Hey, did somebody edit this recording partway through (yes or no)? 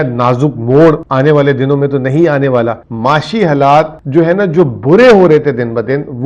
yes